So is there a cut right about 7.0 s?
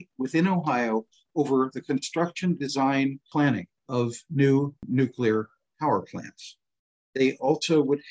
no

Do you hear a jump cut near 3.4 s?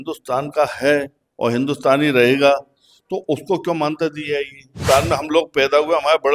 no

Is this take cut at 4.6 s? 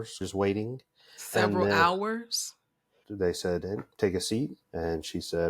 yes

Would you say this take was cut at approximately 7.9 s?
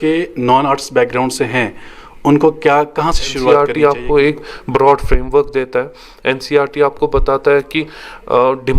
no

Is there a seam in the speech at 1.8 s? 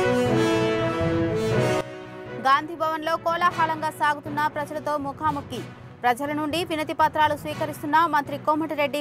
yes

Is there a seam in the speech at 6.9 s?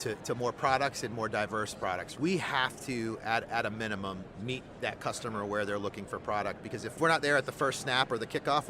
yes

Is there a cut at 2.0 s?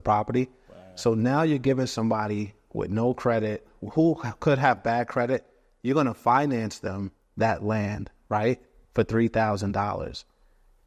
no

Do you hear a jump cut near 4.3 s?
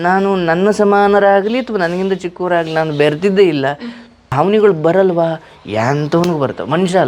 yes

